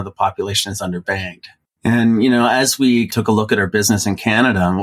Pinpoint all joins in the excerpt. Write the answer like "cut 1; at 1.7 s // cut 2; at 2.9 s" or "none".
cut 1; at 1.5 s // cut 2; at 3.1 s